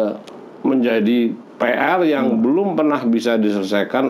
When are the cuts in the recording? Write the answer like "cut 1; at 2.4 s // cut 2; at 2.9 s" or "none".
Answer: none